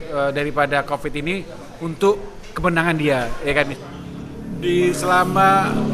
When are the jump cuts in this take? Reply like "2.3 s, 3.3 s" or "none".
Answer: 3.7 s

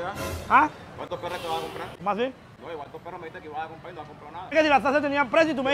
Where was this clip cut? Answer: 1.9 s, 2.5 s, 4.5 s

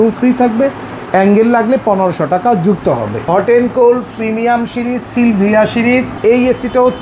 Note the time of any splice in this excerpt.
3.1 s, 6.1 s

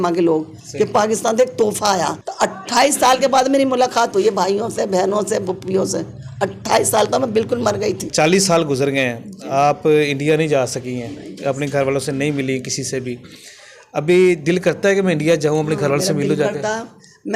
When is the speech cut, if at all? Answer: 2.2 s, 8.1 s

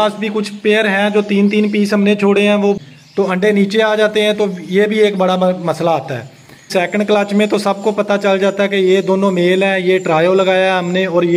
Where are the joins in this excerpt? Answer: 2.9 s, 6.7 s

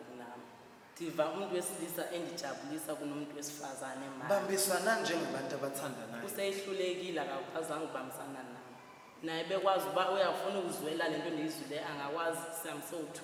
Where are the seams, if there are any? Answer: none

